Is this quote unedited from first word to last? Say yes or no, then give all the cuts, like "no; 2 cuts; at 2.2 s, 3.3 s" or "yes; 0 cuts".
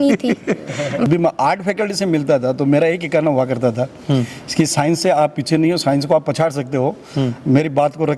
no; 1 cut; at 1.1 s